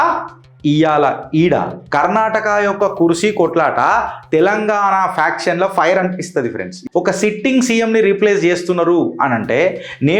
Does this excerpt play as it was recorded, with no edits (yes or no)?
no